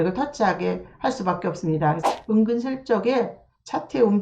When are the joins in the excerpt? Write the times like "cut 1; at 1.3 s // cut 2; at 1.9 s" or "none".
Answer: cut 1; at 2.0 s